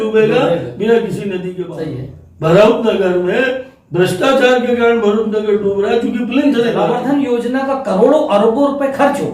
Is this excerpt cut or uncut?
cut